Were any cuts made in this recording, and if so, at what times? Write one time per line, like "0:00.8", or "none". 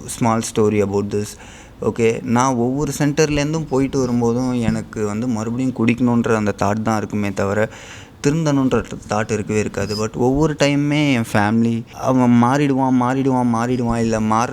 0:11.9